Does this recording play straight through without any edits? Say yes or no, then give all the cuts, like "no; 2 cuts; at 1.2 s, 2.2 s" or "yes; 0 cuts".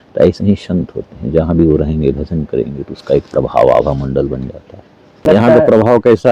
no; 1 cut; at 5.2 s